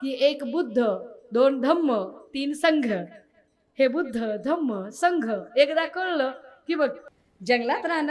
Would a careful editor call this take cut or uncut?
cut